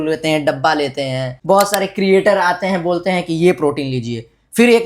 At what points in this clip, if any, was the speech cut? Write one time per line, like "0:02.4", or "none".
0:01.3